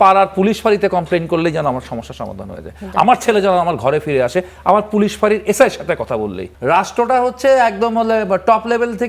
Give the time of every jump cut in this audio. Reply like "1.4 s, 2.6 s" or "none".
6.5 s